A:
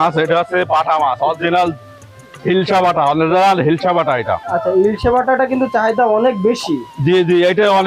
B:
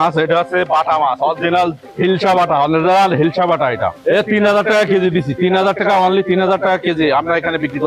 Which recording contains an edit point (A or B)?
B